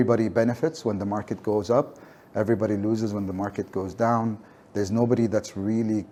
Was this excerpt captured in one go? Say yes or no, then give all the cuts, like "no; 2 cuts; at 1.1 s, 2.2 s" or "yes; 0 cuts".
yes; 0 cuts